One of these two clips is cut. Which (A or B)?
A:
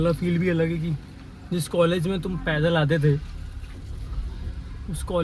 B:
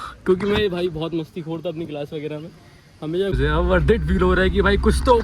B